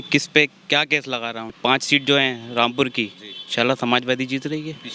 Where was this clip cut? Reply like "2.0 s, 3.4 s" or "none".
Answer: 1.5 s

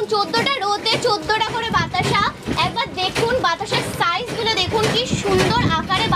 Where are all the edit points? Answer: none

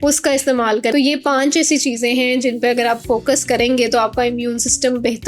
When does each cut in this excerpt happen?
0.9 s

